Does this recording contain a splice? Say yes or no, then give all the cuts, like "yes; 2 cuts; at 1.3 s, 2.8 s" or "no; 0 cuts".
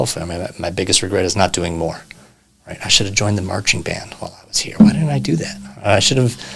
no; 0 cuts